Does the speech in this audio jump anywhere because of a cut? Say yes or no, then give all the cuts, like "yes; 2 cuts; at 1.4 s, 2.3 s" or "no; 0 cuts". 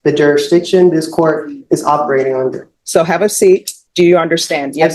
yes; 2 cuts; at 2.7 s, 3.8 s